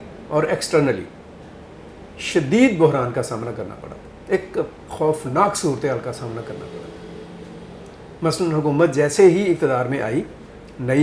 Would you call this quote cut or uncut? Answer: uncut